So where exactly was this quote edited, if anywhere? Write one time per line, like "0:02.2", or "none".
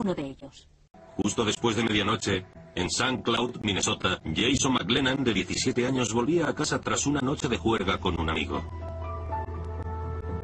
0:08.1